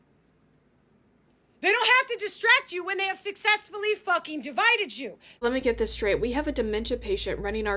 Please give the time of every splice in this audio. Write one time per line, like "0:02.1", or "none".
0:05.3